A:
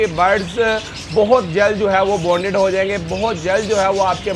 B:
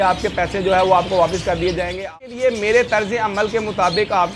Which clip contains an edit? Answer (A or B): B